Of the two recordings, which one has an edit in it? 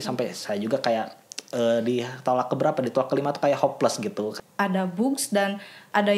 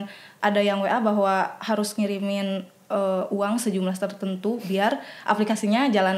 first; 1 cut; at 4.3 s

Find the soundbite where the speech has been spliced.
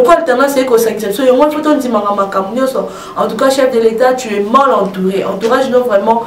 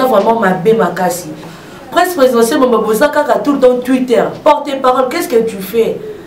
second; 1 cut; at 1.5 s

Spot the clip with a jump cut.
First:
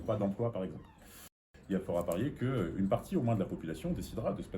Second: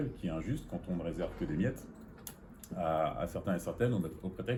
first; 1 cut; at 1.4 s

